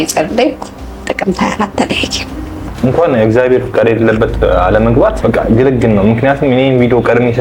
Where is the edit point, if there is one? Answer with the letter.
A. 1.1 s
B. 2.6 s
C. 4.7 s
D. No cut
B